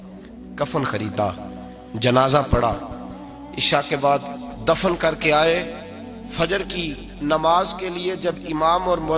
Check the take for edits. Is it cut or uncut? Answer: uncut